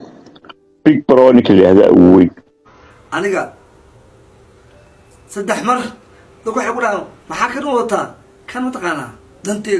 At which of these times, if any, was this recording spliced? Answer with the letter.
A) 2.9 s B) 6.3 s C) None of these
A